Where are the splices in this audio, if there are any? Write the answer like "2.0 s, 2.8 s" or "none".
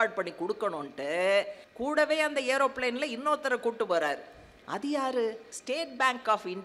1.6 s, 5.5 s